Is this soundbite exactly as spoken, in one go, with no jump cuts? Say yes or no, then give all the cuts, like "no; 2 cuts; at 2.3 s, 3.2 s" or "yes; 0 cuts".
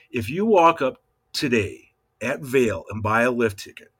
yes; 0 cuts